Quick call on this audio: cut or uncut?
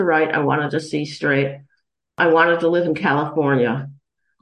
cut